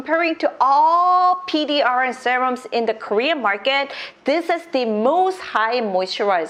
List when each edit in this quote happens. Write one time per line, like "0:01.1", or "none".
none